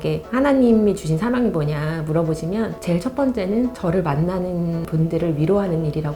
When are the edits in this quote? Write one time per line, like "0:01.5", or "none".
none